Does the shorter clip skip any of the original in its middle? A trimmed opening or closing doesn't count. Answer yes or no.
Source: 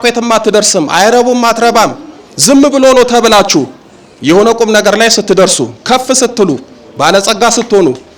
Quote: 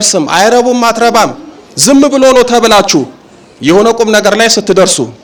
no